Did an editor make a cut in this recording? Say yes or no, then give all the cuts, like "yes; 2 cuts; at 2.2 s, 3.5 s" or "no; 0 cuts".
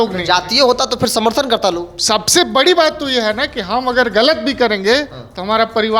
no; 0 cuts